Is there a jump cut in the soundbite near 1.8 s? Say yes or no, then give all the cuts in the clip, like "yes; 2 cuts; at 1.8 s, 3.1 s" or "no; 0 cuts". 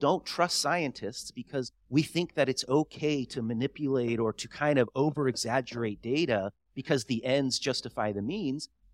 yes; 1 cut; at 1.8 s